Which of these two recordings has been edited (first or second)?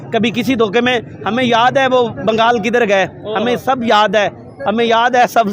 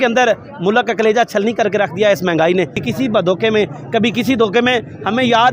second